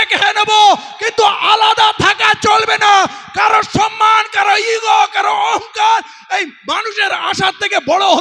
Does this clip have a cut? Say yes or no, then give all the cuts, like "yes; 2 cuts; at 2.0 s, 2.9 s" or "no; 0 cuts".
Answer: no; 0 cuts